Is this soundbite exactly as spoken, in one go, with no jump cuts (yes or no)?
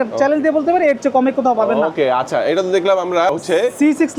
yes